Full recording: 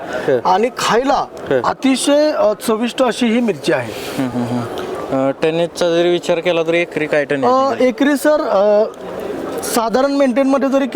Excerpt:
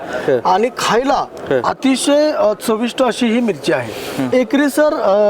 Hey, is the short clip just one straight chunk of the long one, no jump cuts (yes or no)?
no